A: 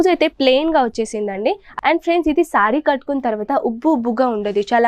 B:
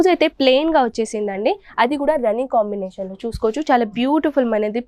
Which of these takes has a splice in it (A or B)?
A